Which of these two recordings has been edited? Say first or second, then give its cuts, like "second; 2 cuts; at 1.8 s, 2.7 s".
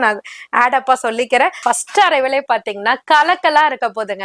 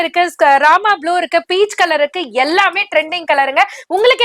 first; 1 cut; at 1.6 s